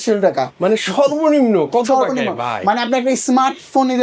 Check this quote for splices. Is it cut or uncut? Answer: uncut